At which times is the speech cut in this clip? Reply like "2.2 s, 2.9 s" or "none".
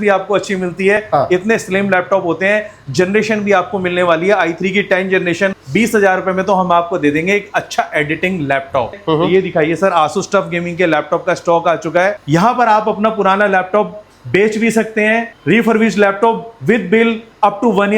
1.0 s, 5.6 s, 9.0 s, 12.2 s